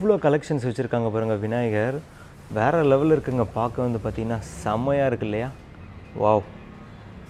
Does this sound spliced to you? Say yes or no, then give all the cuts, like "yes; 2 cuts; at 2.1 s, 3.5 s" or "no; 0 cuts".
no; 0 cuts